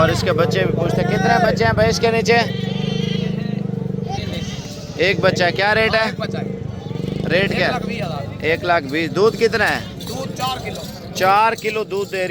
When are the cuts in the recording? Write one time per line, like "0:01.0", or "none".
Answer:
none